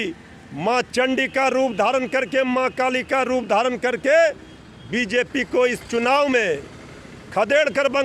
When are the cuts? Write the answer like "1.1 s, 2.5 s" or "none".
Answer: none